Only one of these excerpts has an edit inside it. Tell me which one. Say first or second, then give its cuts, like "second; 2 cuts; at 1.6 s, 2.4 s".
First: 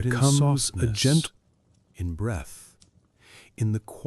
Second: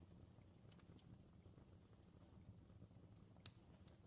first; 1 cut; at 1.2 s